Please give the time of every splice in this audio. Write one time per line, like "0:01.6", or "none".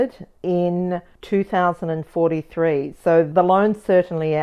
0:03.3